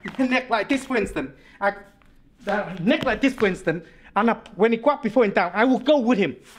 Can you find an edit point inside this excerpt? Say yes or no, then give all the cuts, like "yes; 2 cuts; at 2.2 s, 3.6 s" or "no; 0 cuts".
no; 0 cuts